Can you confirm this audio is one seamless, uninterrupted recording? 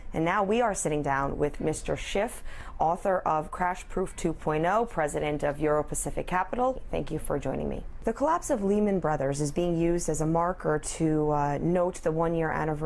no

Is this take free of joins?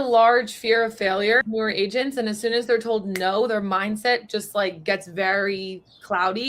no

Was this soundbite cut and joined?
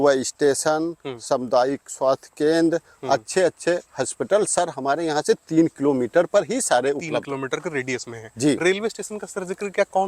no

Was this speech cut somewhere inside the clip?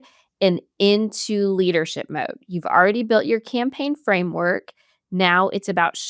no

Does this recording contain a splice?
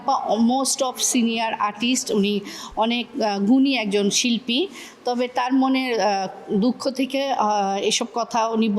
no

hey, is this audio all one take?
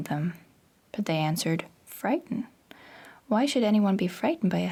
yes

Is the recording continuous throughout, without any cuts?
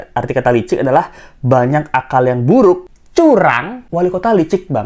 no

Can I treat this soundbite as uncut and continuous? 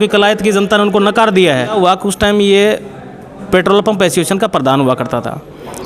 no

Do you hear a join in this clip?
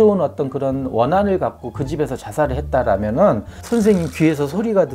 yes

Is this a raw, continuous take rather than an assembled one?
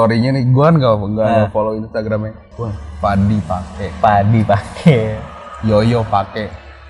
yes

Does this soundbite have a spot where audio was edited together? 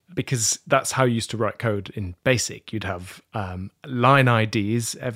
no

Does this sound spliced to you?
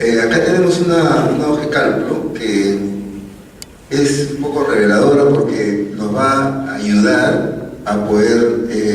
no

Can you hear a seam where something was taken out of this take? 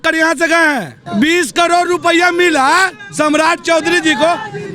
yes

